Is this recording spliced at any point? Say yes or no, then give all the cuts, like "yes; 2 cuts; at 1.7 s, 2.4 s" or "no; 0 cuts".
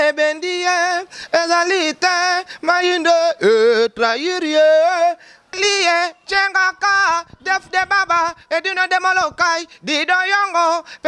yes; 1 cut; at 5.6 s